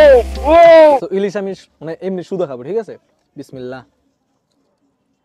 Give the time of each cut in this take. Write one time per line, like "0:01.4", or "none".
0:01.1